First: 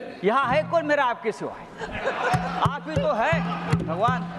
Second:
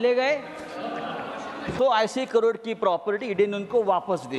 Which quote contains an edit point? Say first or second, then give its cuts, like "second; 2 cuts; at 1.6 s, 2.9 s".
second; 1 cut; at 1.7 s